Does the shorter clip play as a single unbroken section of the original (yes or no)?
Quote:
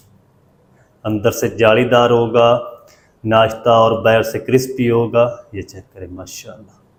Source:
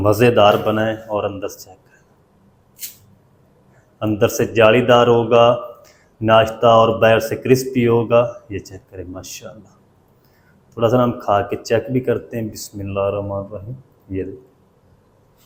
yes